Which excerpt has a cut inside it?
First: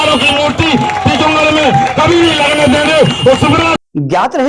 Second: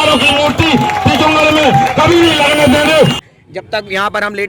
second; 1 cut; at 3.2 s

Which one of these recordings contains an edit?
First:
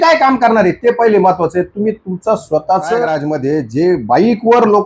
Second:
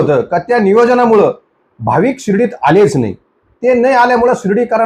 first; 1 cut; at 3.2 s

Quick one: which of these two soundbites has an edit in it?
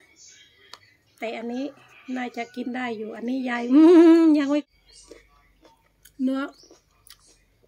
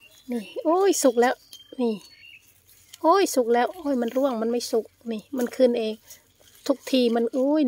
first; 1 cut; at 4.7 s

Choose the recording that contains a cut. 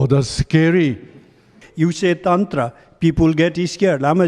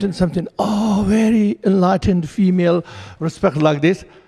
first; 1 cut; at 1.6 s

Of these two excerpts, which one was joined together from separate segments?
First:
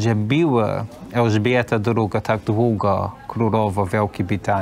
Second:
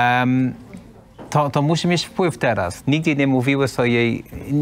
second; 1 cut; at 2.7 s

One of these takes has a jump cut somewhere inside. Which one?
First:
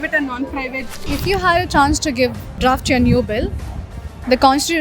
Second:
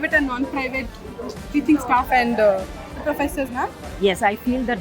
first; 2 cuts; at 0.9 s, 2.6 s

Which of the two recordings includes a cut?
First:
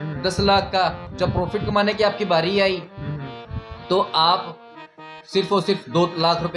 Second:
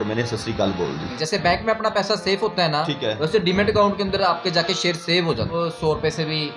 second; 2 cuts; at 1.1 s, 5.5 s

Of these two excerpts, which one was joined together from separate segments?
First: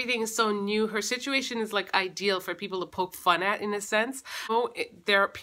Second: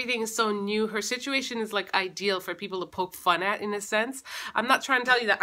first; 1 cut; at 4.5 s

